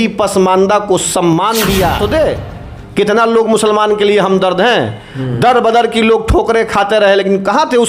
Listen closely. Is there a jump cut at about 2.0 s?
yes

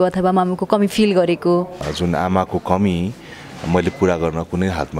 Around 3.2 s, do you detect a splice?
no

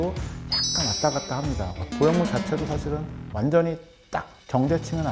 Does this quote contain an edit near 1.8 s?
yes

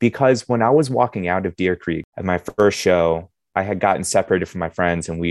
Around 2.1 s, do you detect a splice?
yes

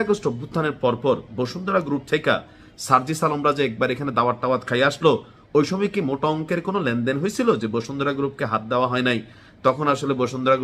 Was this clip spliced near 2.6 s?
no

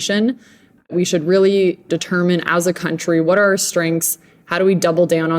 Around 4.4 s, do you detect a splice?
no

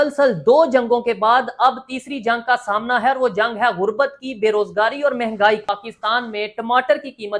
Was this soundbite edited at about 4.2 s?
no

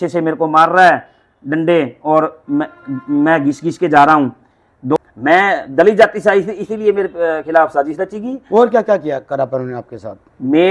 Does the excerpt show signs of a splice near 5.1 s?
yes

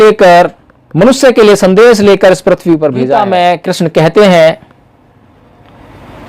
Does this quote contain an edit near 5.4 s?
no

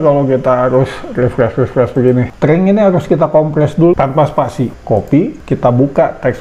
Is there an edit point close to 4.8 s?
no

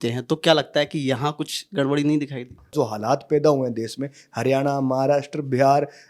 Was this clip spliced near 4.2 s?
no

